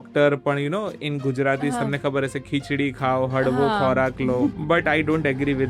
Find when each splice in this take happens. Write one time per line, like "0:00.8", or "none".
0:04.6